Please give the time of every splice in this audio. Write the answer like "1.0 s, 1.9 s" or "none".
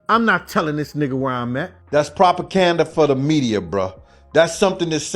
1.8 s